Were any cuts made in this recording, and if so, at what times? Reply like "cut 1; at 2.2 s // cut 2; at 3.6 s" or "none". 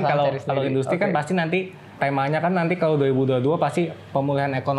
cut 1; at 1.9 s